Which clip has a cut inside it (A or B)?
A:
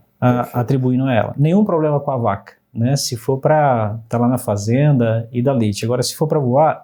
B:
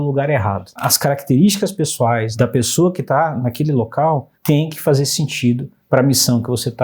B